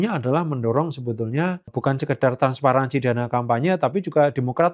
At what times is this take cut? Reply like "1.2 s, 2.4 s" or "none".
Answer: 1.7 s